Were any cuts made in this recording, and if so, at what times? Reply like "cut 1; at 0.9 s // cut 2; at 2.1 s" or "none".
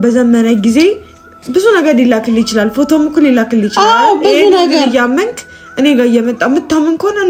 none